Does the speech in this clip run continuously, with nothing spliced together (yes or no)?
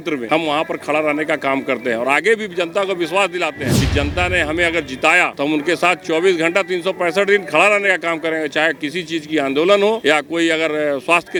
yes